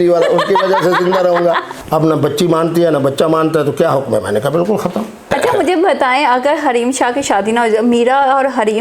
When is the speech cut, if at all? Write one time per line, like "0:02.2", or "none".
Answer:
0:01.7
0:05.3